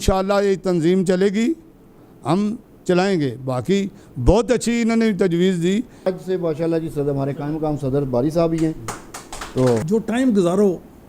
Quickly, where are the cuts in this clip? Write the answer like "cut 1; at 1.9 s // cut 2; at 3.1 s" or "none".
cut 1; at 6.1 s // cut 2; at 9.8 s